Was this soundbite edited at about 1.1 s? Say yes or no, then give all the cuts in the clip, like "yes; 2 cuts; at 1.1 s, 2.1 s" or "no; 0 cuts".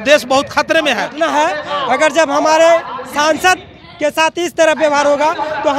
yes; 1 cut; at 1.1 s